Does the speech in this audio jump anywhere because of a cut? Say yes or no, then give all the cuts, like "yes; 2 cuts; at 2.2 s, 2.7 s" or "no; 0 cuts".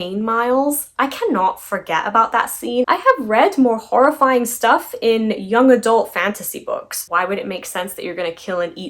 yes; 2 cuts; at 2.9 s, 7.0 s